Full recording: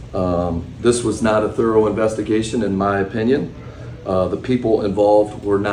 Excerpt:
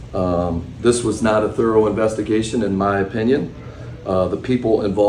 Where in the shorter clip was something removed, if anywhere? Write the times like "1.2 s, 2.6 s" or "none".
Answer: none